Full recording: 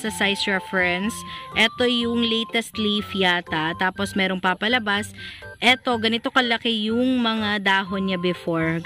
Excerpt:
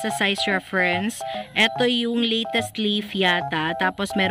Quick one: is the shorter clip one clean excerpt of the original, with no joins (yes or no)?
yes